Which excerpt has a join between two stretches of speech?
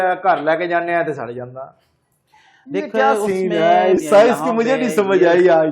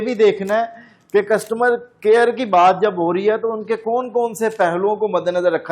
first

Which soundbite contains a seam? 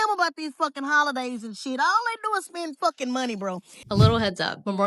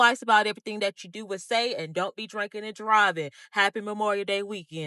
first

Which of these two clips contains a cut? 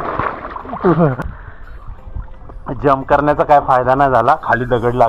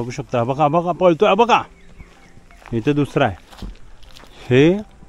first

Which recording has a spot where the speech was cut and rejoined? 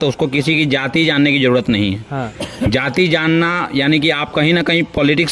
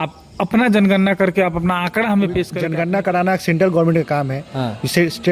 second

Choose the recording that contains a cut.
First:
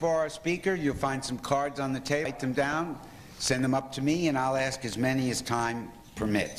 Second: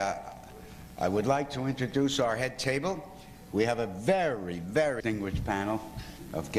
first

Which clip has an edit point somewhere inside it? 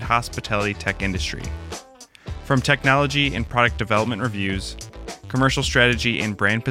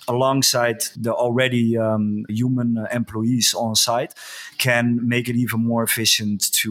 second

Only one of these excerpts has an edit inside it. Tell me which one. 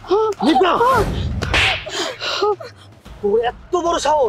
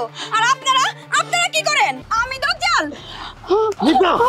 second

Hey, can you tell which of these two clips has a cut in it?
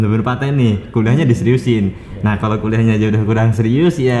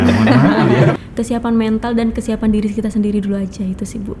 second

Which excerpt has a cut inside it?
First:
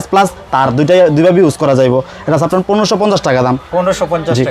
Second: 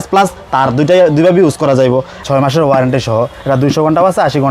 second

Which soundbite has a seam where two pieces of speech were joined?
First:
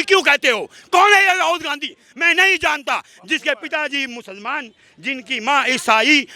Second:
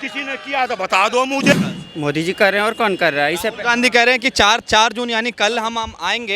second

